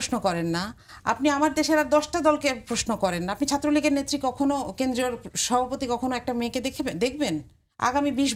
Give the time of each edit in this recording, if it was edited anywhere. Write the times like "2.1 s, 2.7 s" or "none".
none